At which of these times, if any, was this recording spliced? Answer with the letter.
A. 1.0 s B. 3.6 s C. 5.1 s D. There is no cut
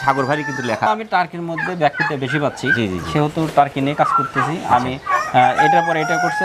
A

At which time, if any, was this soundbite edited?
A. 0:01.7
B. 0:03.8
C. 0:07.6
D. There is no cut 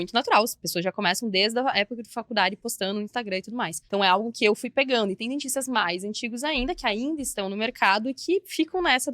B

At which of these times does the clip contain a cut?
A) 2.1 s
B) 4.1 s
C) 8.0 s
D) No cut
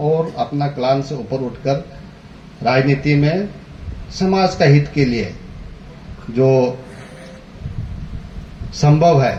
D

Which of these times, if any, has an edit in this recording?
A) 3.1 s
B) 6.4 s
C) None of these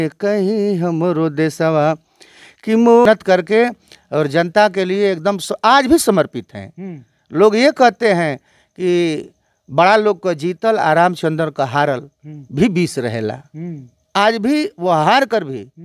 A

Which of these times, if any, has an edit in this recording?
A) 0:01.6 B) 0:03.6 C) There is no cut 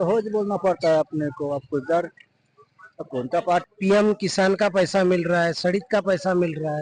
B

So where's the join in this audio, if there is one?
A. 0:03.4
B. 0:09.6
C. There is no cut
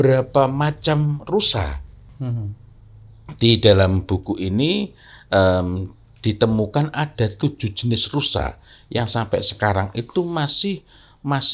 C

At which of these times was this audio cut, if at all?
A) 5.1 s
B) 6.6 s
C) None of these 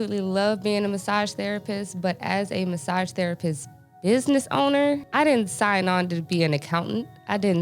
A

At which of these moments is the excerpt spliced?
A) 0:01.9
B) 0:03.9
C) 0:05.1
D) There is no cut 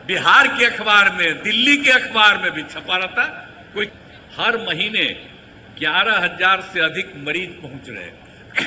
B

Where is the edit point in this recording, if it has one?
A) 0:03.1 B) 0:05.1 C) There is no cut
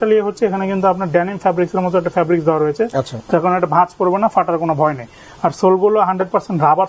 C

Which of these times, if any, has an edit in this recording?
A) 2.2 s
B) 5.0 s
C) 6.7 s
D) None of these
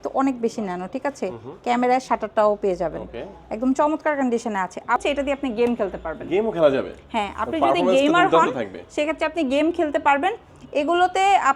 B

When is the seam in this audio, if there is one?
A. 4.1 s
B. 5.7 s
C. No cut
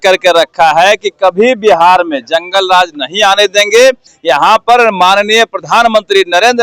A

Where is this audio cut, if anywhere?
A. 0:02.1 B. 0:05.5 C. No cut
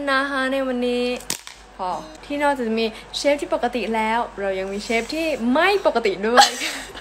A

